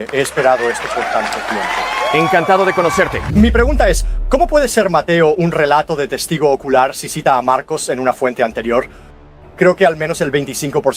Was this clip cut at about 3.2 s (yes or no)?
yes